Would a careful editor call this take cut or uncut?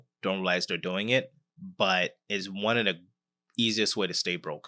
uncut